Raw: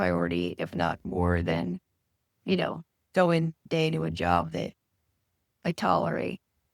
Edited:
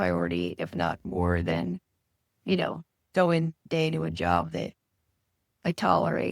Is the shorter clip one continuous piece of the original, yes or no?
yes